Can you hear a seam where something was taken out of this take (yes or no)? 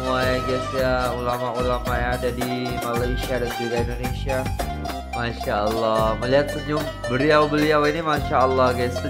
yes